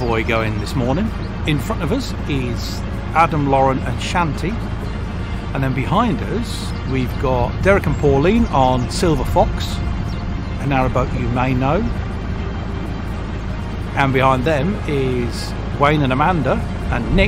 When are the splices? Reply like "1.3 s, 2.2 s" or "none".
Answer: 1.4 s, 5.2 s, 6.7 s